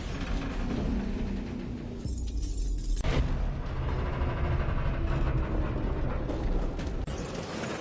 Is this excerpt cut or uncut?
uncut